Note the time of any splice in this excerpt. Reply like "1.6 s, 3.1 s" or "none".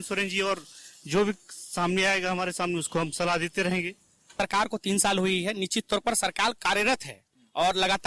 4.3 s

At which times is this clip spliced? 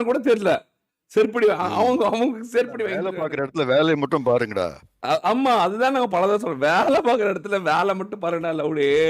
3.2 s

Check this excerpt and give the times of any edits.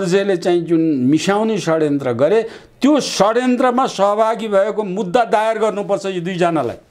none

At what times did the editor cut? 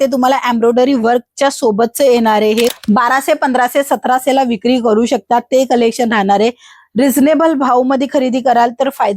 2.7 s

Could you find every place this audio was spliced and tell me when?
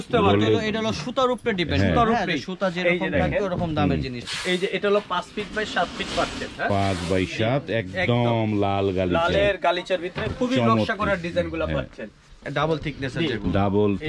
4.3 s, 12.4 s

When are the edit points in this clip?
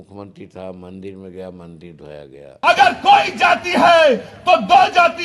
2.5 s

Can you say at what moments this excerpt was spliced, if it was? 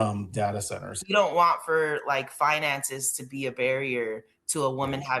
1.0 s

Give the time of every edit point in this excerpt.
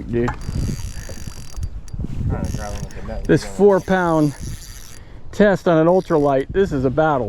none

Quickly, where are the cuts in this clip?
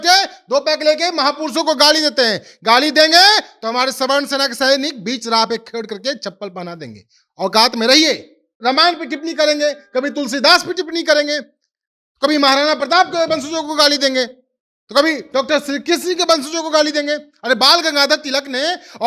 8.5 s

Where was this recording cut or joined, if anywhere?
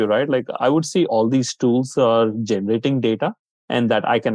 1.1 s

